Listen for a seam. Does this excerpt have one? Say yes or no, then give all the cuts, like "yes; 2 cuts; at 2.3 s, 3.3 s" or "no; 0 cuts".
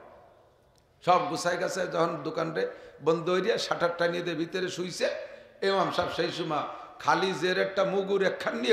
no; 0 cuts